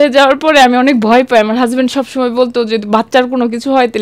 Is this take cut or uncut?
uncut